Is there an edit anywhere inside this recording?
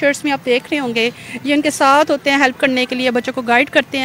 no; 0 cuts

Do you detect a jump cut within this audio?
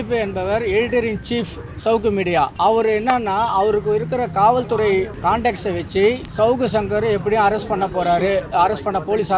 yes; 3 cuts; at 2.5 s, 5.1 s, 6.3 s

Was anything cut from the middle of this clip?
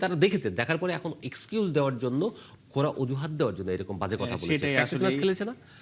no; 0 cuts

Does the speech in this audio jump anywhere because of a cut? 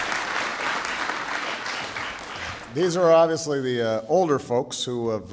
yes; 1 cut; at 1.7 s

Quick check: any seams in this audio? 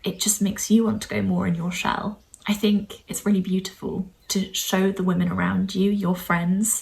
yes; 3 cuts; at 2.3 s, 3.0 s, 4.1 s

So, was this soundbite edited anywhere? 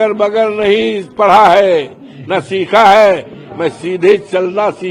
no; 0 cuts

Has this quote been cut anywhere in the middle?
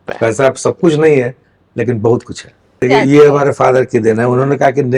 yes; 1 cut; at 2.8 s

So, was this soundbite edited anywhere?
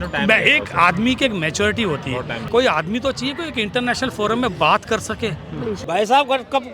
yes; 2 cuts; at 2.4 s, 5.8 s

